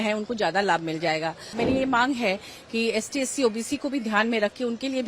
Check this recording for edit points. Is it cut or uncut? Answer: cut